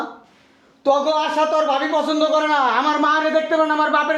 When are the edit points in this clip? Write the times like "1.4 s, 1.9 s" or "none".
none